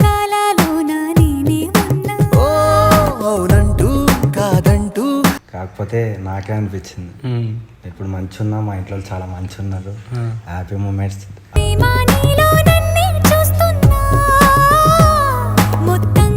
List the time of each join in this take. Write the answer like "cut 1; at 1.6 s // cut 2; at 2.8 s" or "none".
cut 1; at 5.5 s